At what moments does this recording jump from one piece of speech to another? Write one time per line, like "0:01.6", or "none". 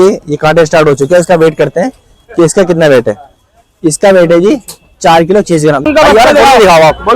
0:05.9